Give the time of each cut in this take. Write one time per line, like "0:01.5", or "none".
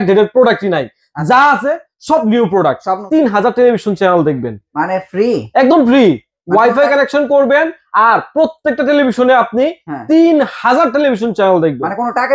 0:02.9